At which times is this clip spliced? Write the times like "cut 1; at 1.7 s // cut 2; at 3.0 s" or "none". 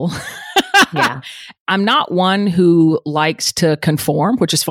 cut 1; at 1.5 s